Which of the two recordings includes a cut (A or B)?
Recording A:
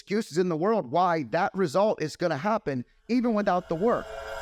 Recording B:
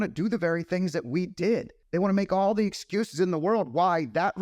B